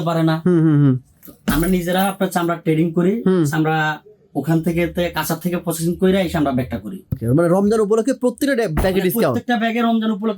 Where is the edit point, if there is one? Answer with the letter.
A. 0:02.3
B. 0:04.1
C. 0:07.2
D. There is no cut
C